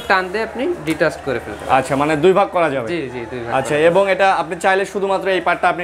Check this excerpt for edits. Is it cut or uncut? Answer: uncut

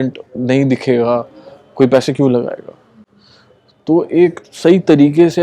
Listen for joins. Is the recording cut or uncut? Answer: uncut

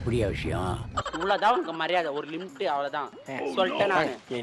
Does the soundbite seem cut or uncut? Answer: cut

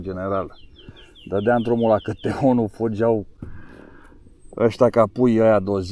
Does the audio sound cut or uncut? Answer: uncut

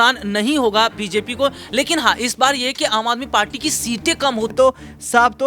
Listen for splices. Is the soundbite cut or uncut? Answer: cut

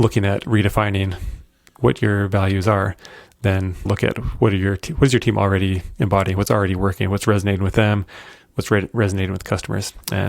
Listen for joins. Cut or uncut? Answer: cut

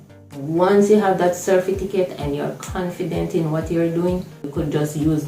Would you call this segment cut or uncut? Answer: cut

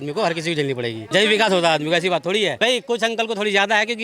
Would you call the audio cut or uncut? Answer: cut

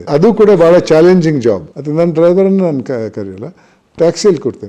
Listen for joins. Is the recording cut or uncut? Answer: cut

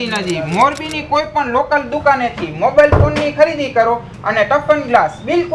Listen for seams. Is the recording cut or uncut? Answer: uncut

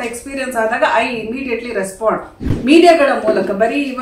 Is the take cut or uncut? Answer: cut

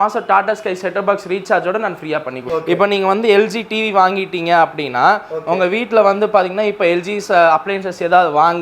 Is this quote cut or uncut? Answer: cut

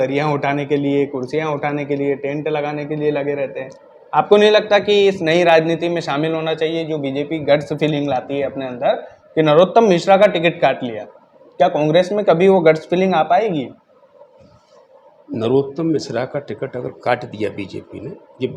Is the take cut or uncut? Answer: uncut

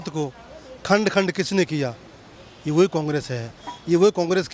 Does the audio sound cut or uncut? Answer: uncut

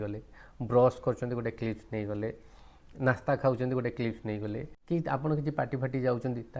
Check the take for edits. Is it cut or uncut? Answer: cut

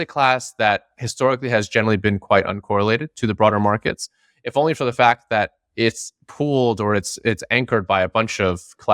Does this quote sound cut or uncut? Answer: uncut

